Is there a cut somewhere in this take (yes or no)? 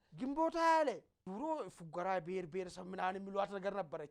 yes